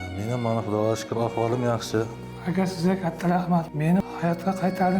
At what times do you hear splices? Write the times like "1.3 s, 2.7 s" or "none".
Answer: 2.3 s, 3.8 s